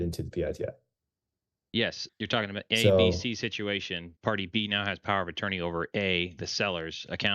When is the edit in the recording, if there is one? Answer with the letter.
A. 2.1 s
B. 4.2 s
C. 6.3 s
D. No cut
A